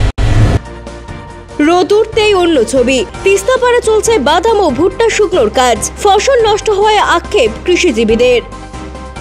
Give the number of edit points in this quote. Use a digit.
0